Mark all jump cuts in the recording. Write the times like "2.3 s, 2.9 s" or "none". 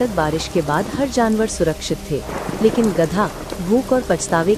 none